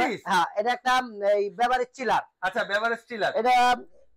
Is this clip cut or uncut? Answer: uncut